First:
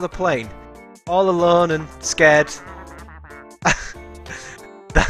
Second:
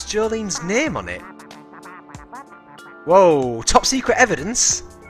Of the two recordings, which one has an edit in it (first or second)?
second